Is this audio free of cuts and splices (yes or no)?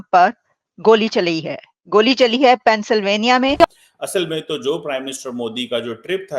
no